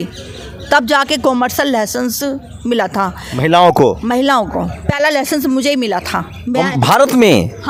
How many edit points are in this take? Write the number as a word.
zero